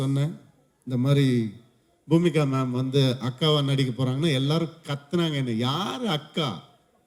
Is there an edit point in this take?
no; 0 cuts

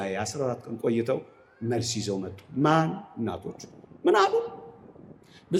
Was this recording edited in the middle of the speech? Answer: no; 0 cuts

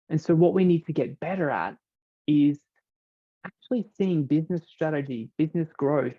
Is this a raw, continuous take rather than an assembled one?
no; 1 cut; at 5.3 s

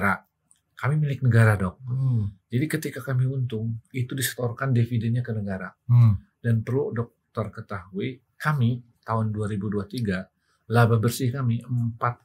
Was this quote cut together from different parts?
no; 0 cuts

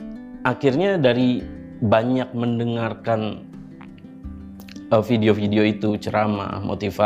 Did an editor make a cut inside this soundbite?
no; 0 cuts

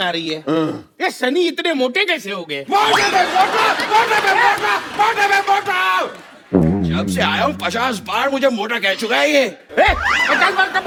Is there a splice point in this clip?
no; 0 cuts

